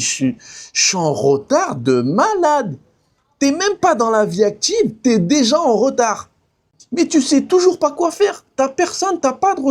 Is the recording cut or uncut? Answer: uncut